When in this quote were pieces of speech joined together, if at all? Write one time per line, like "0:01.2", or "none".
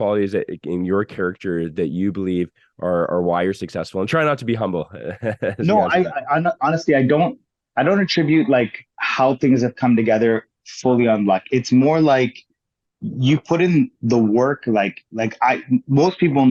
none

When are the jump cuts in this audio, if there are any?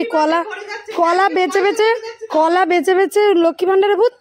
none

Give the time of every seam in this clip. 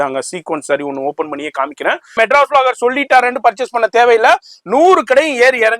0:02.1

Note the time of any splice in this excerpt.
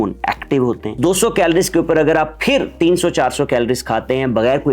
0:00.9

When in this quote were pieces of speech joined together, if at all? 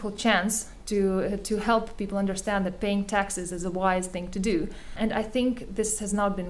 0:04.9

